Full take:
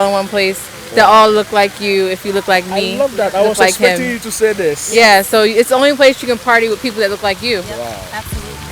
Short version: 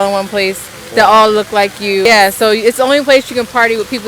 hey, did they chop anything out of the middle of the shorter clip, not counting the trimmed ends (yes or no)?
yes